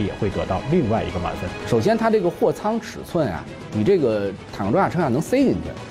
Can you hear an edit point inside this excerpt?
yes; 1 cut; at 1.6 s

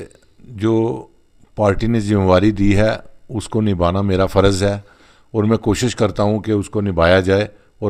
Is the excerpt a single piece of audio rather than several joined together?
yes; 0 cuts

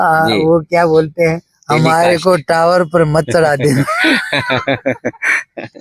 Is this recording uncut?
yes; 0 cuts

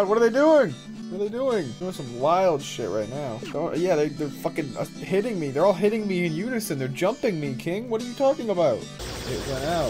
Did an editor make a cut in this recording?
yes; 4 cuts; at 0.9 s, 1.7 s, 3.4 s, 9.0 s

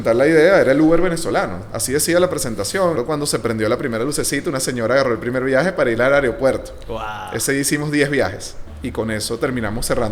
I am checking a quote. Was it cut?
yes; 2 cuts; at 3.0 s, 8.6 s

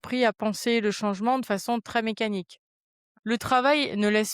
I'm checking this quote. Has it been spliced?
yes; 1 cut; at 3.1 s

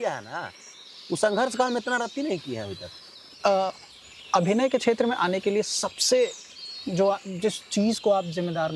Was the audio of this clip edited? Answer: no; 0 cuts

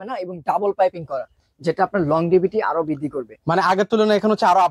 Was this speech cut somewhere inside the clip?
no; 0 cuts

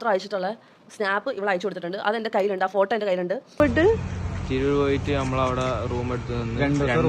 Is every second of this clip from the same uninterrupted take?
no; 1 cut; at 3.5 s

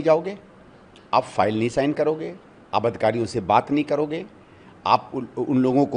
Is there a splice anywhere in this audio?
no; 0 cuts

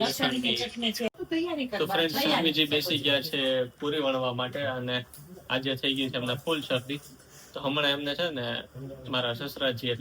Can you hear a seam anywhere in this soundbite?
yes; 1 cut; at 1.1 s

